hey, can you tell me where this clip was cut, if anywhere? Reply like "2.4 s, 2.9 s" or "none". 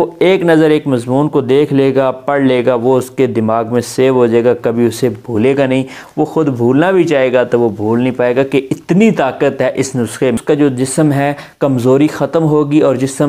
10.4 s